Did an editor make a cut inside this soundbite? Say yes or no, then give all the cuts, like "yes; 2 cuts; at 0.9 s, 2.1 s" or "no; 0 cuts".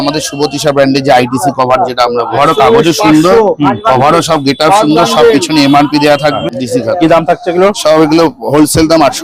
yes; 2 cuts; at 2.3 s, 6.5 s